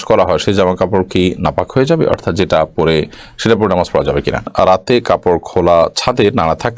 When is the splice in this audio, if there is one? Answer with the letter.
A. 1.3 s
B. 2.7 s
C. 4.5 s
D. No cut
C